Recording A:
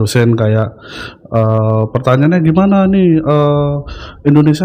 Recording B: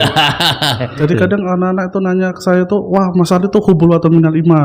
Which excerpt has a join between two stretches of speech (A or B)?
B